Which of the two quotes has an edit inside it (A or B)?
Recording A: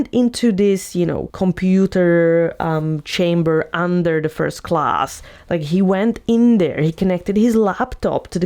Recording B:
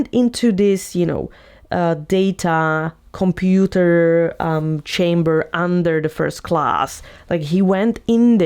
A